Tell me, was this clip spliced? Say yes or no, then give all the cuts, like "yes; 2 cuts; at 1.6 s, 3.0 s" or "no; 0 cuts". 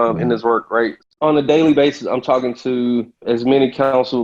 yes; 2 cuts; at 1.0 s, 3.2 s